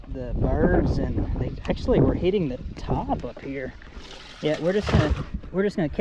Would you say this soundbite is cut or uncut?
uncut